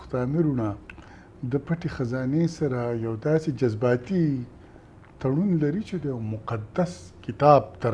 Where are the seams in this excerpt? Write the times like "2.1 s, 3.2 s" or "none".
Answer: none